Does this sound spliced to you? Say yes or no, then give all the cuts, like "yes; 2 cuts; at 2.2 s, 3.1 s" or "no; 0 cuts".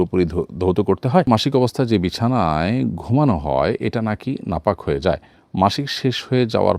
yes; 1 cut; at 1.3 s